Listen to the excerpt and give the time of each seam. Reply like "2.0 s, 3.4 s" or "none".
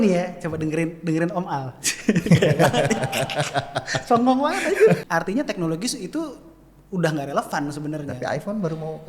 5.0 s